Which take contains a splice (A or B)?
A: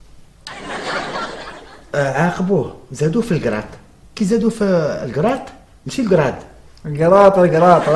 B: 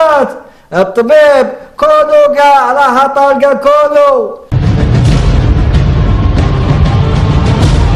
A